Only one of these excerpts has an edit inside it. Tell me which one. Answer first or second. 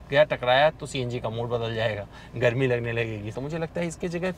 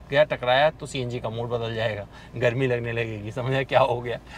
first